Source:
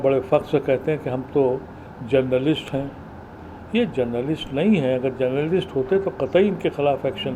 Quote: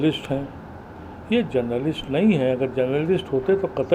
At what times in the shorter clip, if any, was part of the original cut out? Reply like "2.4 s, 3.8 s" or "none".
none